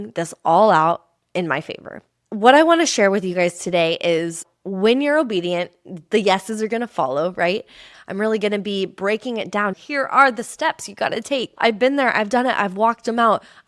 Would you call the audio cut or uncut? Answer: cut